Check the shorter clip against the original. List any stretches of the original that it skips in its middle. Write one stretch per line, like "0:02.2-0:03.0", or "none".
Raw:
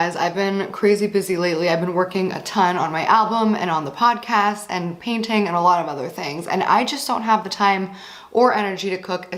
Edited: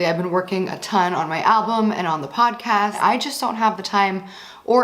0:04.6-0:06.6